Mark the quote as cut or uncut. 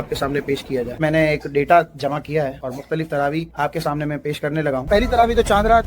cut